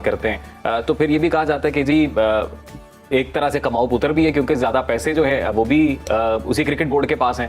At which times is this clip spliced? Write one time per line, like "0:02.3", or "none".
none